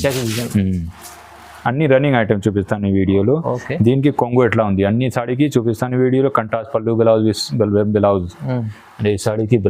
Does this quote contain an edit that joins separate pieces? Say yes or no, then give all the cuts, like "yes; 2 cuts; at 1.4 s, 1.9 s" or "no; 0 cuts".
no; 0 cuts